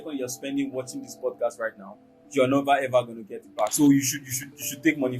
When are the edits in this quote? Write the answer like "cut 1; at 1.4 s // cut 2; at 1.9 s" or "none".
cut 1; at 3.7 s